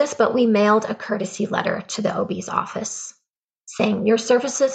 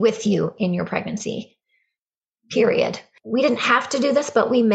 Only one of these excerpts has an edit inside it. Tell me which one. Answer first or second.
second